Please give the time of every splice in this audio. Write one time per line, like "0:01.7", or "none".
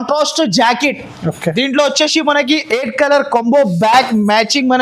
none